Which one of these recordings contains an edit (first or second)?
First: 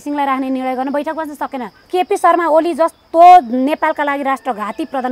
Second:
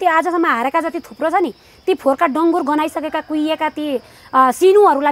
first